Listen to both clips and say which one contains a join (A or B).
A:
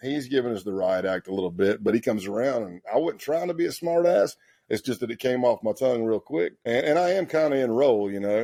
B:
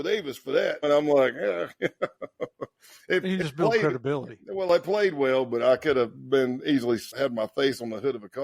B